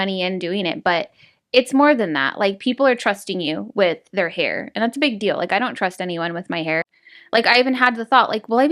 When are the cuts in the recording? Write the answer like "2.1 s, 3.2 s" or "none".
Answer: 6.9 s